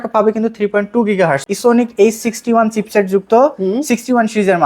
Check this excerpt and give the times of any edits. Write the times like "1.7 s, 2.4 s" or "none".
1.4 s

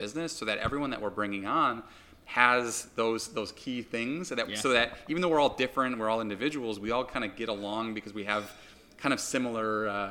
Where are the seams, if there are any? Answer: none

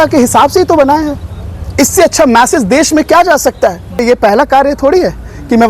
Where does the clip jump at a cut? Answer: 4.0 s

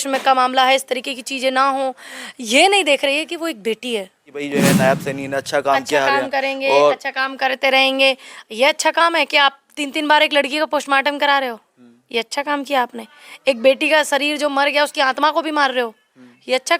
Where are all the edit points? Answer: 4.5 s

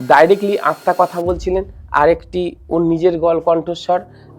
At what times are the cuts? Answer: none

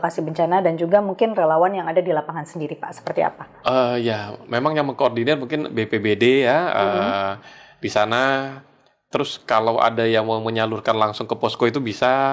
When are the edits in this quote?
none

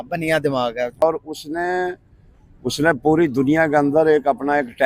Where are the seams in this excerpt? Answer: 1.0 s

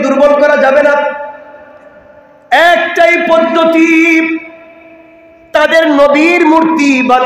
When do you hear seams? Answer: none

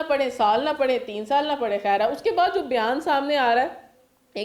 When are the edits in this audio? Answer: none

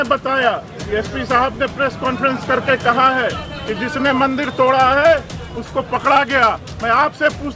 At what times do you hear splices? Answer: none

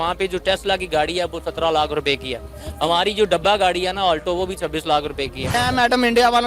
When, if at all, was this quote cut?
5.4 s

